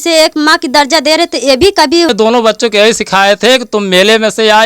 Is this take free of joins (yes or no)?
no